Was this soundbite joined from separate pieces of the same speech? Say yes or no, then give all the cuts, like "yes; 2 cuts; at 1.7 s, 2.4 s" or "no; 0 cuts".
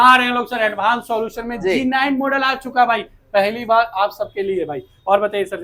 no; 0 cuts